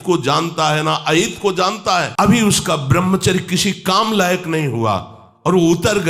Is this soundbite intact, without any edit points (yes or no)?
no